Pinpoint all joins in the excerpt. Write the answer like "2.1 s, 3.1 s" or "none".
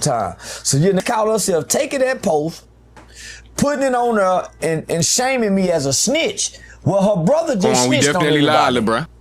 1.0 s